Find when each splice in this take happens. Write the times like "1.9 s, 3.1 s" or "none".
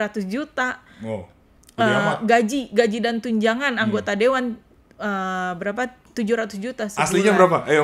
none